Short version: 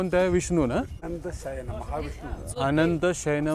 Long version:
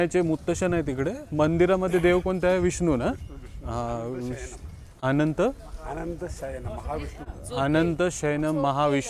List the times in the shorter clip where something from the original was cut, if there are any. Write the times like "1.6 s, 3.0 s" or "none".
1.0 s